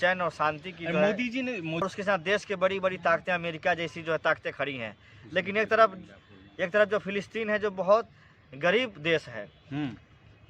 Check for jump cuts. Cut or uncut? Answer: cut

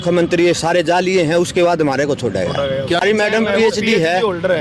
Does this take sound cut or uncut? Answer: cut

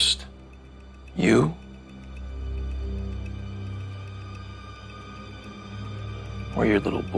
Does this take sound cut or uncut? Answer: uncut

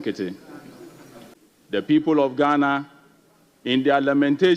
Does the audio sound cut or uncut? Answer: cut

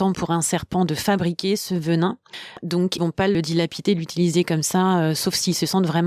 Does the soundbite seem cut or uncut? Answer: cut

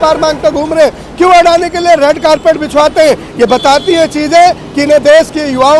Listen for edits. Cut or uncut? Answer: uncut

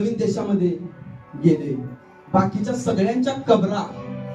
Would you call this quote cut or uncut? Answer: uncut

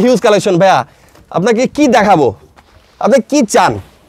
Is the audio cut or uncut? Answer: uncut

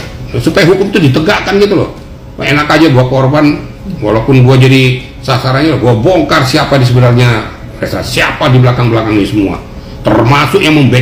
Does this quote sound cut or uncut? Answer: uncut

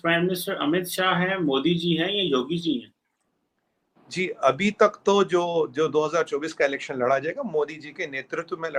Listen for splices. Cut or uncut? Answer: uncut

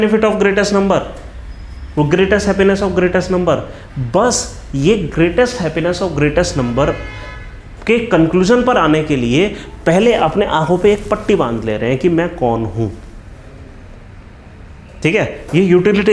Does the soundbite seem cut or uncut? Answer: uncut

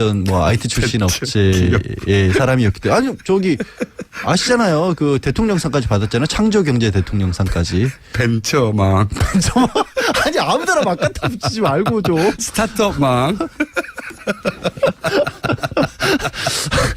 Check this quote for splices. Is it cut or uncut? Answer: cut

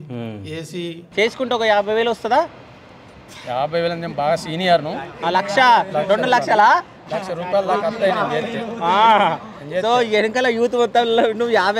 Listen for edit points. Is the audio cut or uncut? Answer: cut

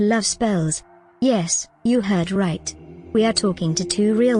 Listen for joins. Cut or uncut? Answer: uncut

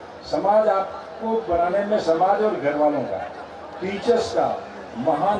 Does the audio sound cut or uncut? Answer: uncut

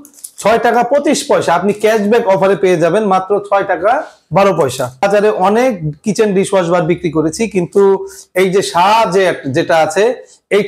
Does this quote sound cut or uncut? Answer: cut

